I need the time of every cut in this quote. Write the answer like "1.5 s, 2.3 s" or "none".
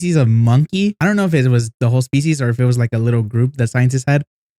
1.0 s, 1.7 s